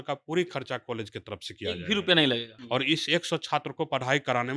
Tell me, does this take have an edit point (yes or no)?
yes